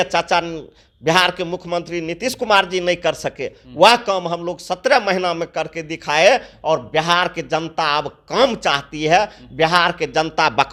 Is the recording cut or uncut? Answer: uncut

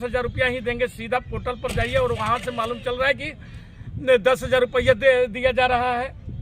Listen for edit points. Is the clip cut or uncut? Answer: uncut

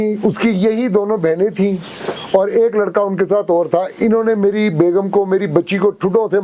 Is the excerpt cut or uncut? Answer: uncut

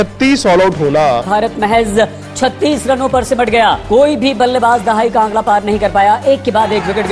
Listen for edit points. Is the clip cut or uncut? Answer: cut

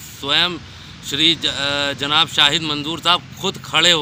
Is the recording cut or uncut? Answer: uncut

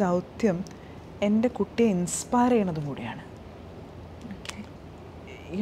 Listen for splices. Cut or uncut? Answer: uncut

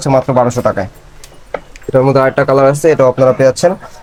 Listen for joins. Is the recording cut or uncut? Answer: uncut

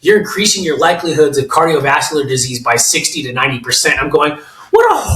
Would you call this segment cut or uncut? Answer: uncut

